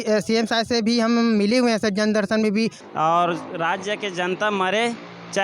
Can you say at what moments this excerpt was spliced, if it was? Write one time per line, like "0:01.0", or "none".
0:02.8

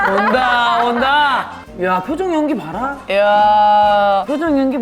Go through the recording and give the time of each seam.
0:01.6

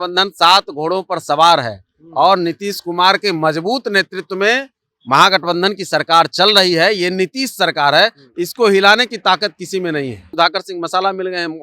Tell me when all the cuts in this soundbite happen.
0:10.2

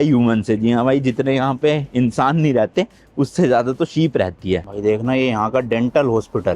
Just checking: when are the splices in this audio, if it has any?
0:04.6

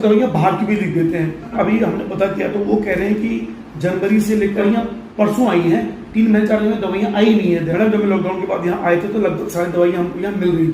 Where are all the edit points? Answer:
0:01.5
0:04.6
0:07.7

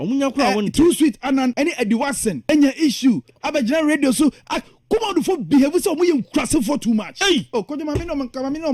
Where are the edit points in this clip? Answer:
0:01.5
0:02.4
0:07.5

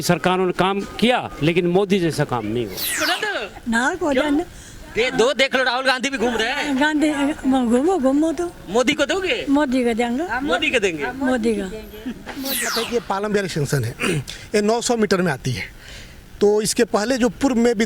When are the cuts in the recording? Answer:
0:03.0
0:12.7

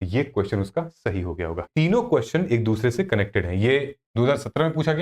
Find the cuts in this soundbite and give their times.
0:01.6

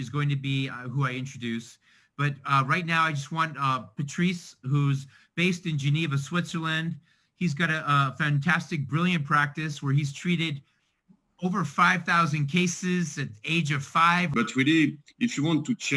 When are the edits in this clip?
0:14.3

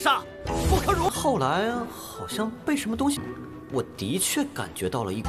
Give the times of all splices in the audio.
0:01.1

